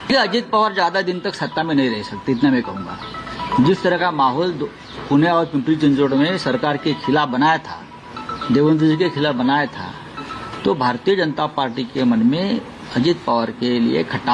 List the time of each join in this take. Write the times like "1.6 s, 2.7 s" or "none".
none